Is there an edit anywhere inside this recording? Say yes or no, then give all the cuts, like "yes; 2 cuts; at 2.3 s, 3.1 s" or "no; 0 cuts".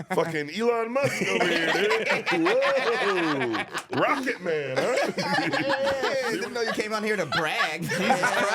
yes; 1 cut; at 6.1 s